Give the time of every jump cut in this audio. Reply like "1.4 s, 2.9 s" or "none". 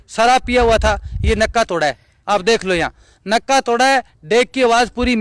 none